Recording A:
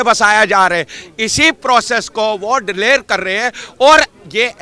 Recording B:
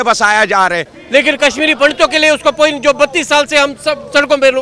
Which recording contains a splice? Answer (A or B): B